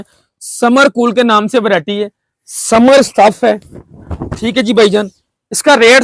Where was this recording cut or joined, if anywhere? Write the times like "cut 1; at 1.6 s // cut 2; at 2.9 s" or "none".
none